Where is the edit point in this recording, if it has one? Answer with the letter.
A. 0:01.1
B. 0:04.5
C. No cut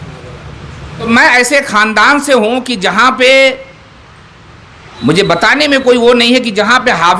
A